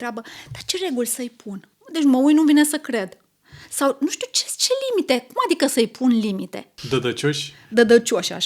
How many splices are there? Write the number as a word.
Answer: two